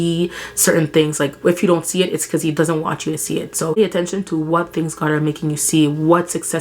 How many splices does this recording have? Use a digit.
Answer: 1